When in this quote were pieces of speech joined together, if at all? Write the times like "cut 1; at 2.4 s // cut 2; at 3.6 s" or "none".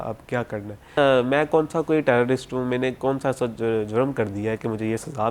cut 1; at 1.0 s